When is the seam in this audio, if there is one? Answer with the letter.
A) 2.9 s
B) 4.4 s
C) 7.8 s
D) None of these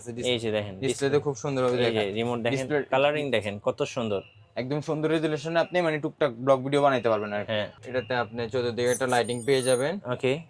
C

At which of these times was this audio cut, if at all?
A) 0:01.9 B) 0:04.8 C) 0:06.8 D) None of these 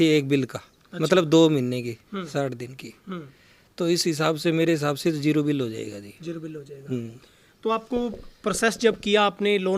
D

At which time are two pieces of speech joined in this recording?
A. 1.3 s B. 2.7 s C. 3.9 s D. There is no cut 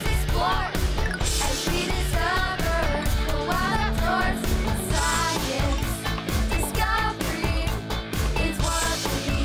D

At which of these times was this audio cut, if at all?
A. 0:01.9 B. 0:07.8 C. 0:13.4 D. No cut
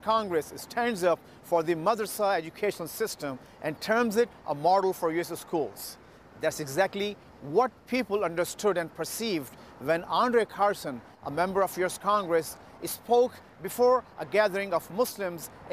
C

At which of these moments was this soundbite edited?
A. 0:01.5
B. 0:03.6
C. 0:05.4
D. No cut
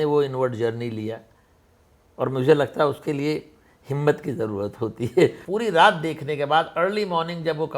C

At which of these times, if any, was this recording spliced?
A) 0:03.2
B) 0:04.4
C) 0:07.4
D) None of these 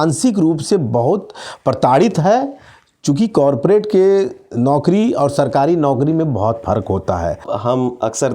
C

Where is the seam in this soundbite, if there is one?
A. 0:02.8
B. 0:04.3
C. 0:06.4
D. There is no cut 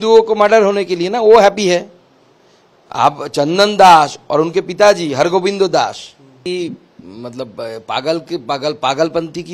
C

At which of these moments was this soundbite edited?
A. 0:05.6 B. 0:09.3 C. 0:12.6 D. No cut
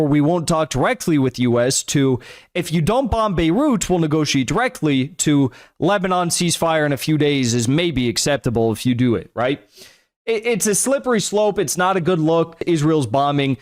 C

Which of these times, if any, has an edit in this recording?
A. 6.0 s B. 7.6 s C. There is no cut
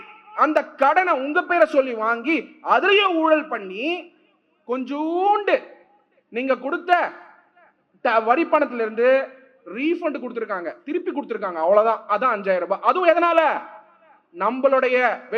C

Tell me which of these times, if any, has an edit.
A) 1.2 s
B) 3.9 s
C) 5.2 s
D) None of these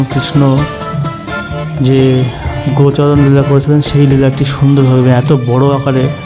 D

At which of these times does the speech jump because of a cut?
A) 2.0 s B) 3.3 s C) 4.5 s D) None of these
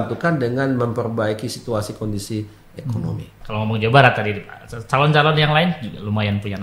B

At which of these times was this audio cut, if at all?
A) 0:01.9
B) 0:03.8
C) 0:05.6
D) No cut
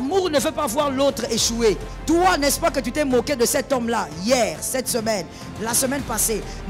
A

